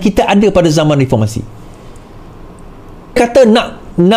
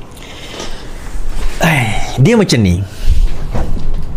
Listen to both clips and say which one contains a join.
first; 1 cut; at 3.2 s

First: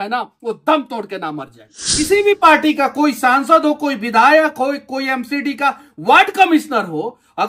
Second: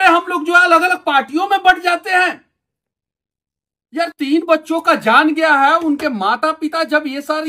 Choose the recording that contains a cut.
first; 1 cut; at 2.1 s

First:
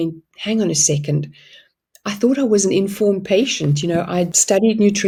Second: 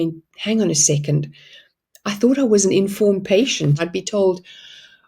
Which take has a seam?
second; 1 cut; at 3.8 s

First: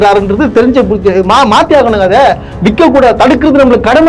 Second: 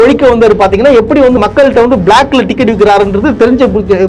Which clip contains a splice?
second; 1 cut; at 1.4 s

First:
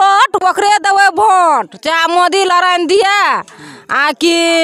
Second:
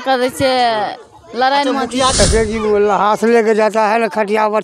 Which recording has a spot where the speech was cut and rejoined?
second; 1 cut; at 2.2 s

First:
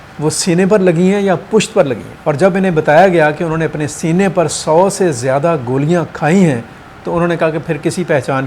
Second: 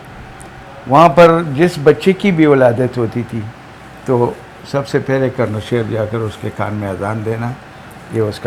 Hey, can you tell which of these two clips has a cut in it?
first; 1 cut; at 2.1 s

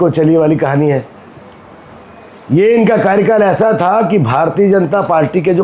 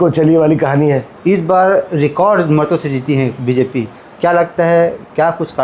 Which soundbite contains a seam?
second; 1 cut; at 1.1 s

